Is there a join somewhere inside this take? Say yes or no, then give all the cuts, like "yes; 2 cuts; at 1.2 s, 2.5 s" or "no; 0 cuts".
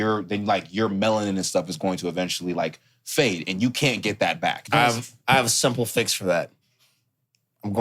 yes; 1 cut; at 4.6 s